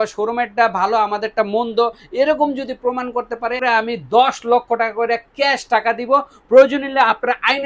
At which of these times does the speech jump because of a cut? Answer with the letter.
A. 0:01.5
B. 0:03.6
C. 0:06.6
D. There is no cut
B